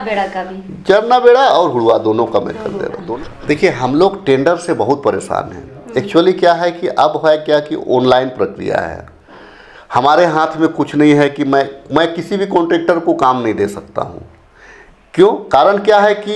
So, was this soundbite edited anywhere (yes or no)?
yes